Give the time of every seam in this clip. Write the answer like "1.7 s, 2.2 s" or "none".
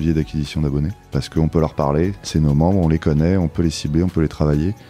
1.0 s, 2.2 s